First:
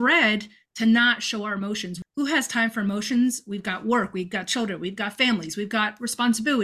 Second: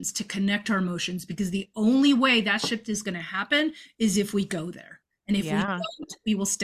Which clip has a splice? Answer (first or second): first